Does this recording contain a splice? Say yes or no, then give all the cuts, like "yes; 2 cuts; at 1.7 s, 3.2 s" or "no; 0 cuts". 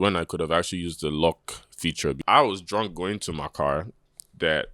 yes; 1 cut; at 2.2 s